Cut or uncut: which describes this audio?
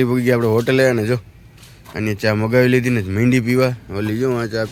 uncut